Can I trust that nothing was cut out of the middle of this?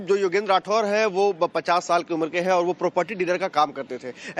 no; 1 cut; at 2.8 s

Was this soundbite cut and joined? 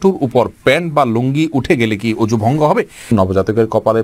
yes; 1 cut; at 3.1 s

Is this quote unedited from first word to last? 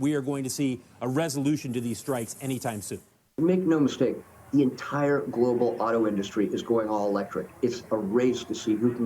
no; 1 cut; at 3.3 s

